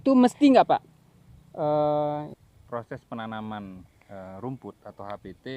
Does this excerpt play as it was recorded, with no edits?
no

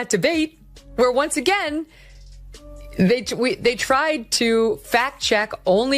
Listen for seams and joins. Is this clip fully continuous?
yes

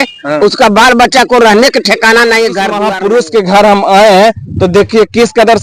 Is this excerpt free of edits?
no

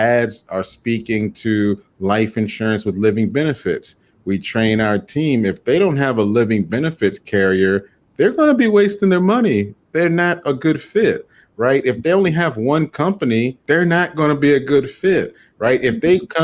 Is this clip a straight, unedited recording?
no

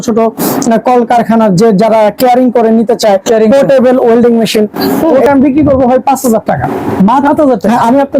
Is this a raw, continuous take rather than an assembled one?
no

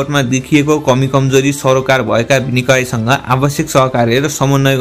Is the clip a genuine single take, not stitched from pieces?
yes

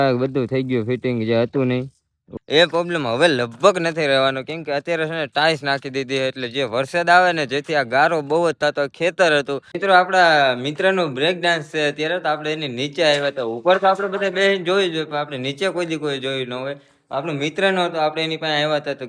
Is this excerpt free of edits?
no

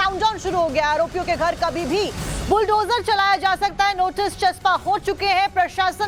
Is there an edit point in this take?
no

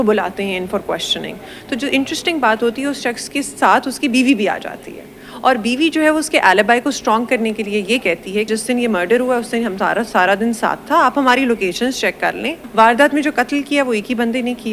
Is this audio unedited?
no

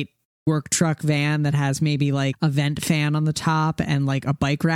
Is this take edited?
yes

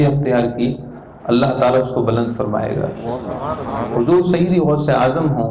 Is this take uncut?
no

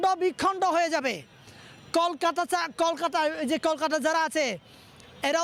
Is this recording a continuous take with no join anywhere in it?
yes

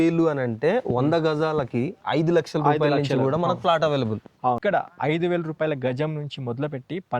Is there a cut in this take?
yes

